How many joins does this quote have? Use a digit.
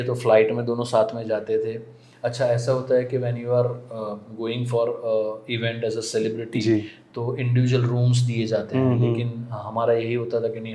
0